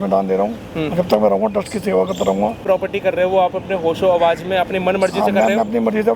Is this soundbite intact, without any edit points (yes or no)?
no